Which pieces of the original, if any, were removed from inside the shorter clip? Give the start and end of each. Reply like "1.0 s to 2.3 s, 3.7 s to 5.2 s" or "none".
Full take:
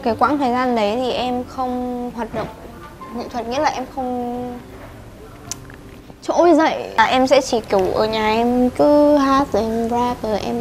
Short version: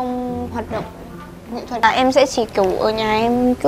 3.3 s to 6.9 s